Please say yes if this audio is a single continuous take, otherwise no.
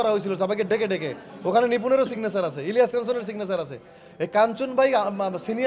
yes